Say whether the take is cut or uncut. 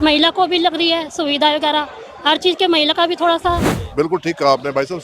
cut